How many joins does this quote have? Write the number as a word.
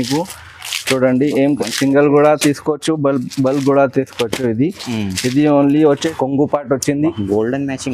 one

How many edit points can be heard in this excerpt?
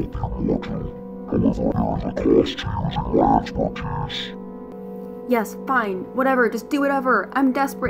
two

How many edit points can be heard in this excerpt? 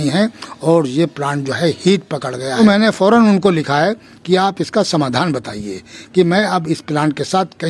one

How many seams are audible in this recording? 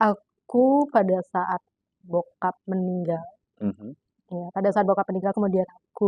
zero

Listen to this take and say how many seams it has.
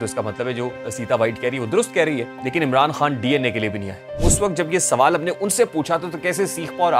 two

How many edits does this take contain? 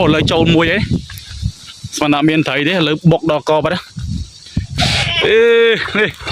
one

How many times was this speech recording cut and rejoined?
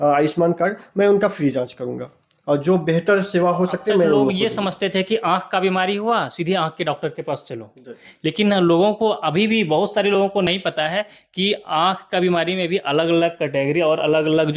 two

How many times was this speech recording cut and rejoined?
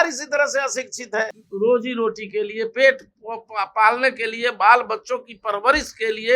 one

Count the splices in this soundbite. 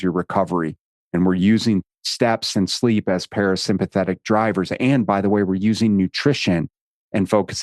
zero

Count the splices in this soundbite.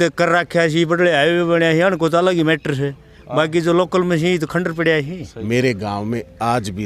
one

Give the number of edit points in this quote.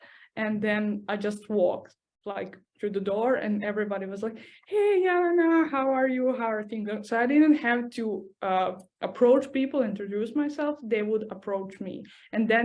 zero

